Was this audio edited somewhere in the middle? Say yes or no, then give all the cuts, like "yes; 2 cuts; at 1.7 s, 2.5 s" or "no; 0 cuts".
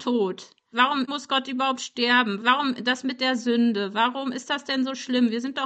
yes; 1 cut; at 1.0 s